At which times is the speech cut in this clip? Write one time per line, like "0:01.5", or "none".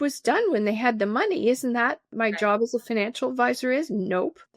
0:02.1